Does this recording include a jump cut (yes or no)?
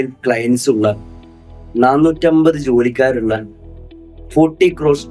no